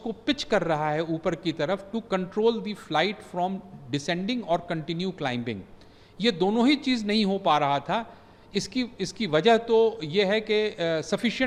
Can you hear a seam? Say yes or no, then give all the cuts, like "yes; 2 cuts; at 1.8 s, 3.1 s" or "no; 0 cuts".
no; 0 cuts